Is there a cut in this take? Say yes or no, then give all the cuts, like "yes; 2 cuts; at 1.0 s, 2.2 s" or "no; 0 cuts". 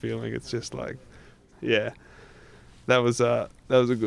yes; 1 cut; at 1.4 s